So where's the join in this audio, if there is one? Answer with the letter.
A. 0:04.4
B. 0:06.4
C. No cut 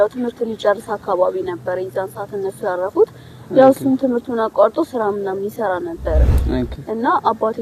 B